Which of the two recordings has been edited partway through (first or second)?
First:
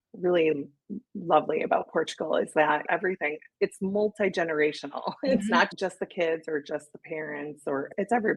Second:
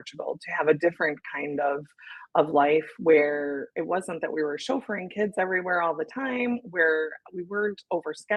first